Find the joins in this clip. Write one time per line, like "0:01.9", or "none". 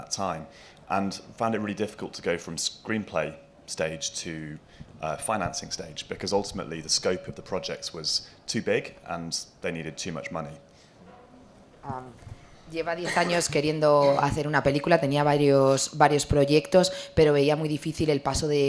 0:06.9